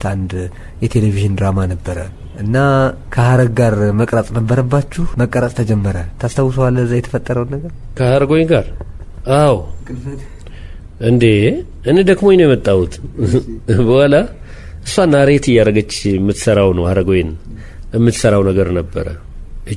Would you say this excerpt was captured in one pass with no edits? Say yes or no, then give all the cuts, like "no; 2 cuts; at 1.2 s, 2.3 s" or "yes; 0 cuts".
yes; 0 cuts